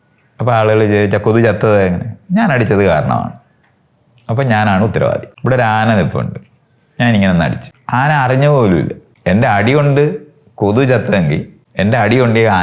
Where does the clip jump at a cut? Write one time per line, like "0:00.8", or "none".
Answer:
0:05.3
0:07.7
0:09.1
0:11.6